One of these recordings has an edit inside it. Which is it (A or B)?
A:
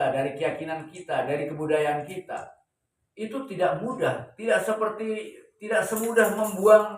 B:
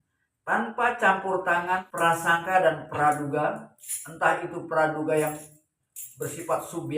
B